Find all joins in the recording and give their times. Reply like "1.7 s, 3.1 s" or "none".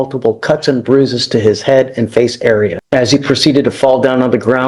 2.8 s